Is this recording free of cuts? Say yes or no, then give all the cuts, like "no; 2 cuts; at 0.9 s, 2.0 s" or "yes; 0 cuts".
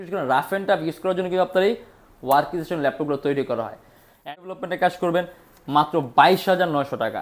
no; 1 cut; at 4.3 s